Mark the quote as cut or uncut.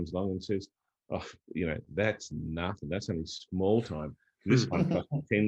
uncut